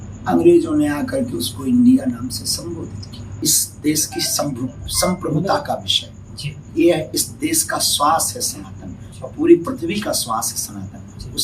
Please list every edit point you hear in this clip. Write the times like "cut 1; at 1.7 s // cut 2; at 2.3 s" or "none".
cut 1; at 3.4 s